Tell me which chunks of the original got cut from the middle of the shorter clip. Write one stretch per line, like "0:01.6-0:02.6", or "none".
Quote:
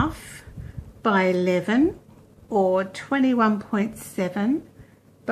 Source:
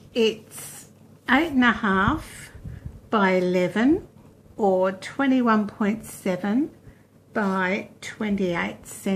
none